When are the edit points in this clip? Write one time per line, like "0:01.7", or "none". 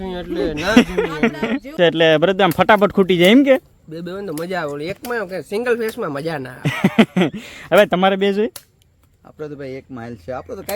0:01.7